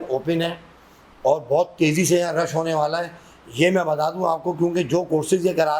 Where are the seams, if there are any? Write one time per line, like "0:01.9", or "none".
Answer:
none